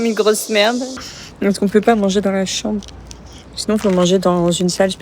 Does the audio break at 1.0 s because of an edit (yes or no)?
yes